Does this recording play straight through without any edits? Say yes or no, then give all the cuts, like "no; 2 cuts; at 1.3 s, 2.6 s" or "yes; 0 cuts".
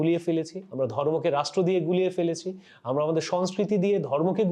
yes; 0 cuts